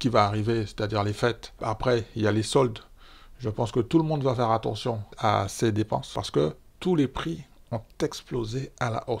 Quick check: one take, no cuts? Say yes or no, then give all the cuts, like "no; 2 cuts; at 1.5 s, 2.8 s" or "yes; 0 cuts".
no; 3 cuts; at 1.6 s, 5.1 s, 6.1 s